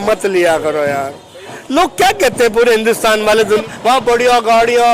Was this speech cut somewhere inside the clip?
yes; 1 cut; at 3.6 s

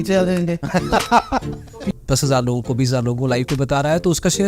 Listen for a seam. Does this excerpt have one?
yes; 1 cut; at 1.8 s

